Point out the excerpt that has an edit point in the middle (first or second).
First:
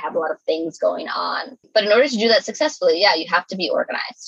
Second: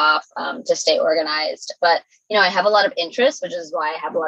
first